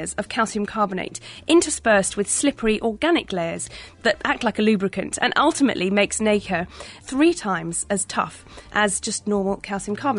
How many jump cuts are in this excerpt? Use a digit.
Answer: 3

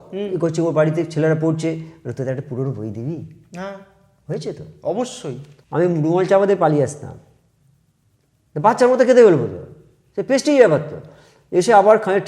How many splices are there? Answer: 1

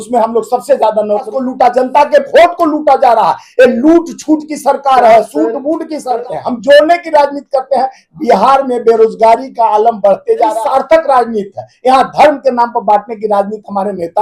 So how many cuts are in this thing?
3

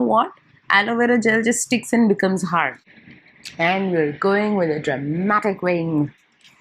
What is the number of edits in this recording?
1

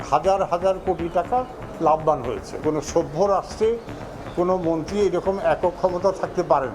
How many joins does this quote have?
1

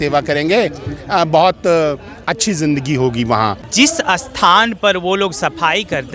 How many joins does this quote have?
1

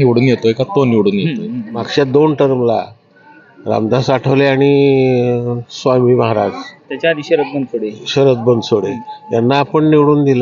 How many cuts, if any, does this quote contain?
1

